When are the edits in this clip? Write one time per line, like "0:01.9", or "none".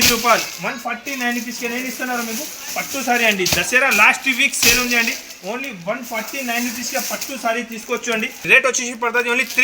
0:08.5